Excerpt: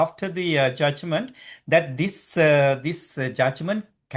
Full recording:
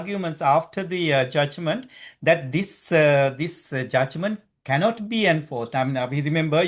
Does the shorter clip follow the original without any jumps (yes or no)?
yes